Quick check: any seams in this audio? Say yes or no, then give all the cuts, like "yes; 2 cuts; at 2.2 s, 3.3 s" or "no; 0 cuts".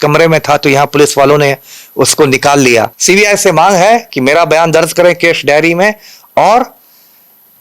yes; 1 cut; at 3.0 s